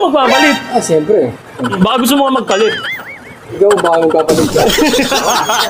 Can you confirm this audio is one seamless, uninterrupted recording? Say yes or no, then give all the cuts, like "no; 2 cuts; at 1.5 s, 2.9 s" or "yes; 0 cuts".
no; 1 cut; at 1.7 s